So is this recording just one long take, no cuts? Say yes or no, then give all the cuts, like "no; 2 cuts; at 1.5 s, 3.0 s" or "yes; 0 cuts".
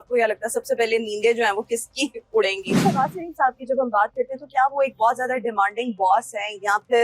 no; 1 cut; at 2.8 s